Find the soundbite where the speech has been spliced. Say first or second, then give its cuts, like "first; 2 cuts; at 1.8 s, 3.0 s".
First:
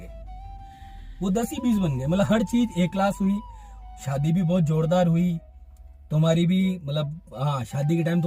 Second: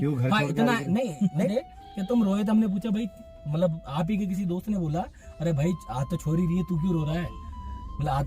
second; 1 cut; at 1.5 s